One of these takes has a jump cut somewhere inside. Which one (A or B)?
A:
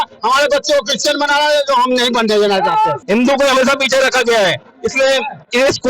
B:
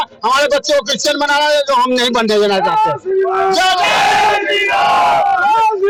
A